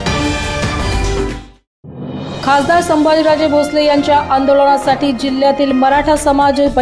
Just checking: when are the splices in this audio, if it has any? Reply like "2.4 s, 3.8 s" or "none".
2.3 s